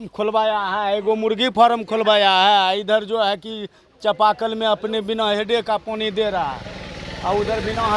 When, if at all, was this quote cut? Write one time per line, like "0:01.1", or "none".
none